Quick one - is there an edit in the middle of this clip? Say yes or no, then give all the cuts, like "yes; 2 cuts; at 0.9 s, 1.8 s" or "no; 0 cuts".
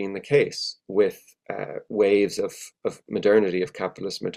no; 0 cuts